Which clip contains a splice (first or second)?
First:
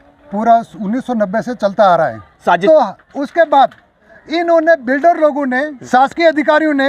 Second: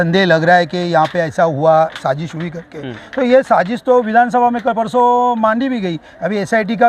first